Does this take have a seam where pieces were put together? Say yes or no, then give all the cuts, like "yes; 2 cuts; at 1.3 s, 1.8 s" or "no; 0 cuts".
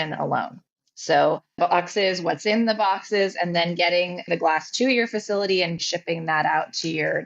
yes; 1 cut; at 5.8 s